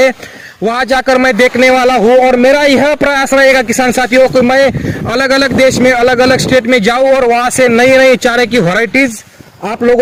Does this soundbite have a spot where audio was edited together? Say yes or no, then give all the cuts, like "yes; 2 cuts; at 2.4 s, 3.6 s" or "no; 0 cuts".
no; 0 cuts